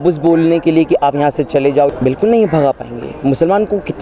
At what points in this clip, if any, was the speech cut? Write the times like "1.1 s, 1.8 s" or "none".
1.9 s

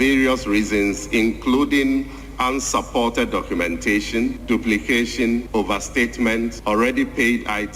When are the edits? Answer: 4.4 s, 5.5 s, 6.6 s

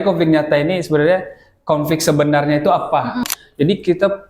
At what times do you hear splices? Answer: 3.3 s

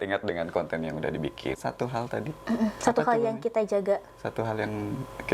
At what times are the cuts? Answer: 1.5 s

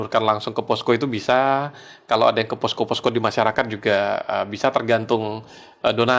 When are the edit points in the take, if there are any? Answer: none

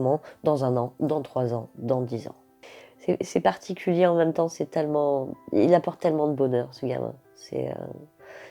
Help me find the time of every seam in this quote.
2.9 s

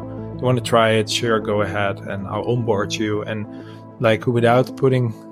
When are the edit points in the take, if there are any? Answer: none

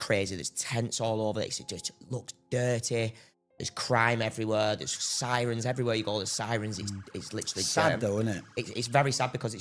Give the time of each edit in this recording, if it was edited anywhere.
none

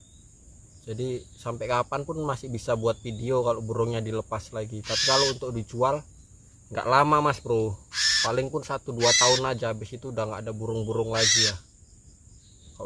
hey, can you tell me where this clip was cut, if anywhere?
none

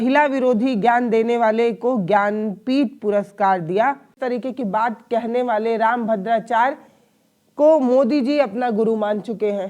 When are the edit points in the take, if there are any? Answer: 4.2 s

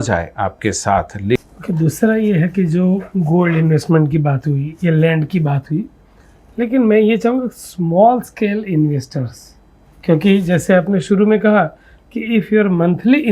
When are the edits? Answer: 1.4 s

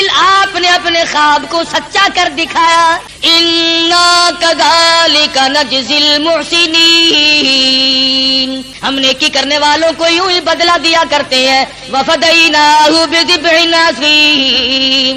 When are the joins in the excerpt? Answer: 3.1 s, 8.7 s

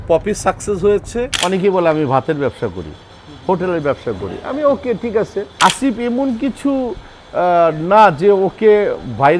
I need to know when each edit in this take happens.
1.3 s, 5.5 s

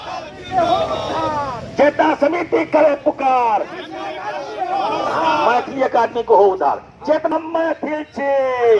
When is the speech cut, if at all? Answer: 7.3 s

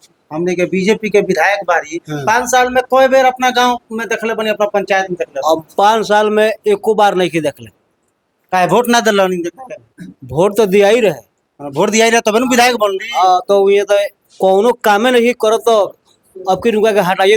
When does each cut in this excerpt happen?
none

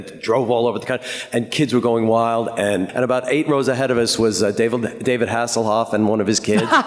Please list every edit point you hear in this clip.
2.9 s

